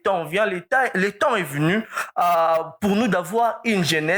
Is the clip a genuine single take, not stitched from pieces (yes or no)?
yes